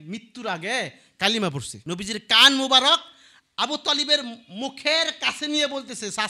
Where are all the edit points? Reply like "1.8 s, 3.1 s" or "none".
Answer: 1.7 s